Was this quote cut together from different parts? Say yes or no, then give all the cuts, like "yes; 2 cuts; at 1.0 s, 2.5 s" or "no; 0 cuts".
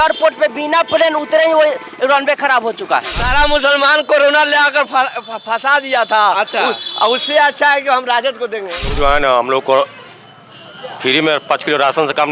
yes; 2 cuts; at 3.2 s, 8.8 s